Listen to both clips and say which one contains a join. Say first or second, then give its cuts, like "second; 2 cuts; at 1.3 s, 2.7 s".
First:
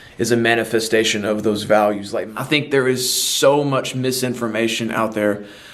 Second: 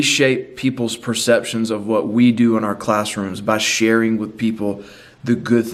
first; 1 cut; at 2.2 s